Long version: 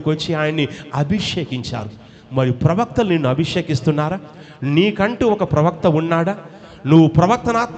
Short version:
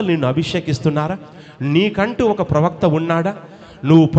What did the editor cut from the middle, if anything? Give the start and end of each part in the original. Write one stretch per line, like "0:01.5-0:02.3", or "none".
none

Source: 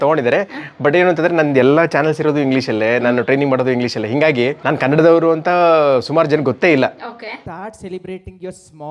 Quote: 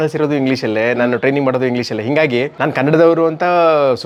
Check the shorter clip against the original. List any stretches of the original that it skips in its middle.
none

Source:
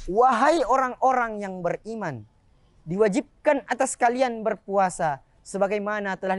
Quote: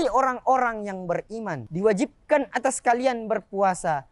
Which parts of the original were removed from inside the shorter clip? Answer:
0:02.2-0:02.8

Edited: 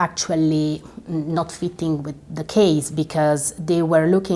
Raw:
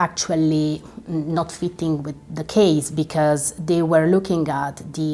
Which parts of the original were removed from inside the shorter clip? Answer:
none

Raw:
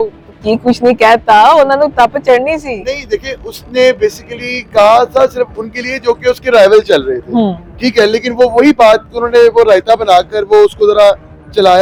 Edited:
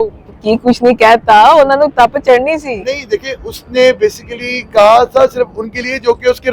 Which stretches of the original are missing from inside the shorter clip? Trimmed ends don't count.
none

